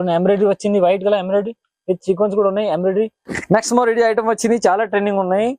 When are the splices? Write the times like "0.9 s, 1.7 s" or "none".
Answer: 3.2 s